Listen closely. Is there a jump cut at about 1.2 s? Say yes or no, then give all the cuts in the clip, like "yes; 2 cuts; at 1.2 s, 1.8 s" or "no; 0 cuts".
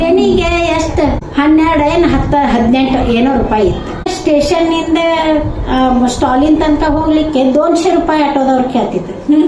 yes; 2 cuts; at 1.2 s, 4.0 s